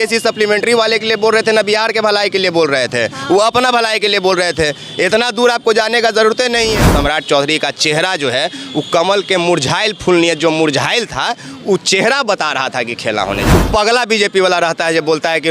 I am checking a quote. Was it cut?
yes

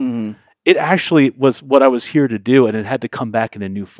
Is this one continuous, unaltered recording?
yes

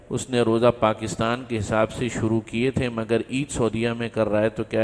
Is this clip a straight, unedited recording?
yes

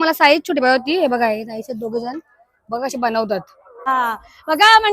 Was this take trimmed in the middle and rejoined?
yes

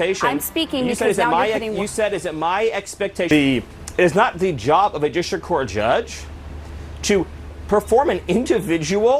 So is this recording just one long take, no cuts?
no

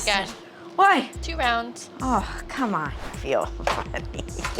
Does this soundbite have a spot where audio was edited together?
yes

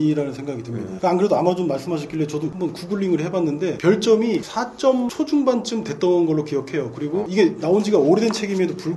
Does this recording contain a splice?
no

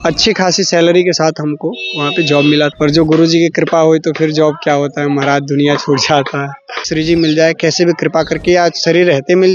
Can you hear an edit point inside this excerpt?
yes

